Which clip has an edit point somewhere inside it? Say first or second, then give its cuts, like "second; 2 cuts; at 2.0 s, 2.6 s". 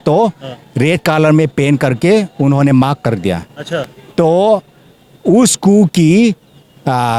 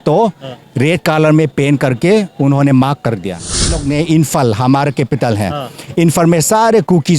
second; 1 cut; at 3.8 s